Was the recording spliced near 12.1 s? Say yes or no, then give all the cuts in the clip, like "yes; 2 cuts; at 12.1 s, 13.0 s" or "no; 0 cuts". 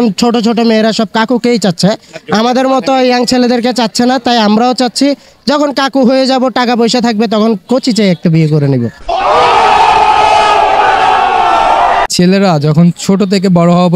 yes; 1 cut; at 12.1 s